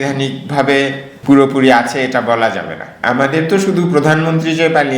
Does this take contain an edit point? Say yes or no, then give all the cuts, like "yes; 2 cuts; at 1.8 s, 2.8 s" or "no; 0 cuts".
yes; 1 cut; at 3.0 s